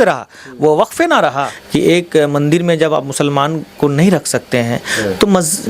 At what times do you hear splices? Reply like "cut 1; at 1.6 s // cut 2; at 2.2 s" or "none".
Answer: cut 1; at 1.5 s